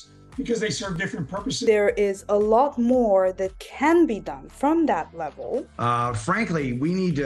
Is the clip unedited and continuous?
no; 2 cuts; at 1.6 s, 5.7 s

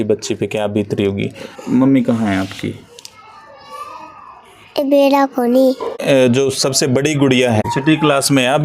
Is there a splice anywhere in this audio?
yes; 2 cuts; at 5.9 s, 7.7 s

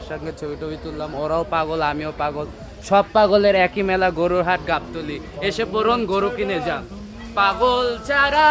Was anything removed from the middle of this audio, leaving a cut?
no; 0 cuts

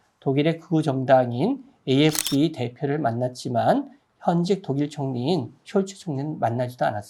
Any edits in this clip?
no; 0 cuts

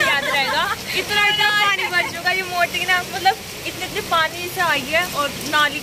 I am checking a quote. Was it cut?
no; 0 cuts

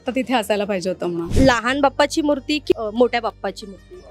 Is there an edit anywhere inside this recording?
yes; 1 cut; at 1.2 s

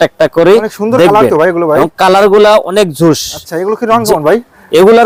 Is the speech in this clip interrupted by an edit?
no; 0 cuts

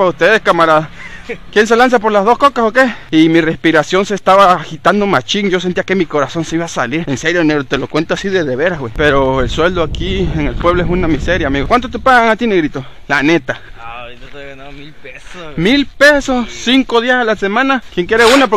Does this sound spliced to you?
yes; 3 cuts; at 3.1 s, 8.9 s, 17.8 s

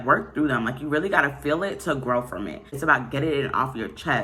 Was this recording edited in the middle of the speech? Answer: yes; 1 cut; at 2.7 s

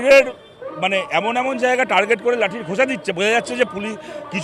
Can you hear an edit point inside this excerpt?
no; 0 cuts

